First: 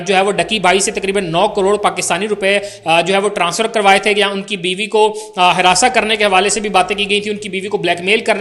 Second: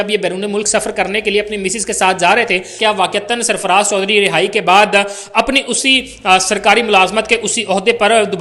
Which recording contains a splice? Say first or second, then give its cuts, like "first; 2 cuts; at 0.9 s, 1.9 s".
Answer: second; 1 cut; at 2.7 s